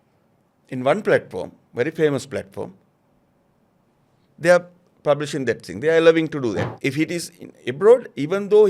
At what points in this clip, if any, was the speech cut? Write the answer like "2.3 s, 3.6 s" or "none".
6.7 s